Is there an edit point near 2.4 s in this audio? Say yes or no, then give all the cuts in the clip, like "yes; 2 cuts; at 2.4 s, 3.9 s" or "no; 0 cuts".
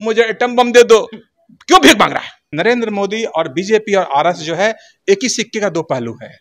yes; 1 cut; at 2.4 s